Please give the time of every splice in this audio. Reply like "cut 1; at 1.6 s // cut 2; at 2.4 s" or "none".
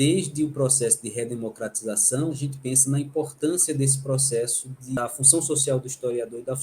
cut 1; at 2.5 s // cut 2; at 5.0 s